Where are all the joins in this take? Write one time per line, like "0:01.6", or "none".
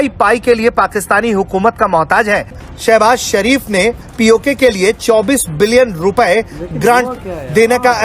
0:02.6